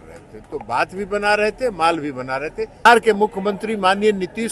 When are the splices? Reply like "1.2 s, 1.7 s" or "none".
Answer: 2.8 s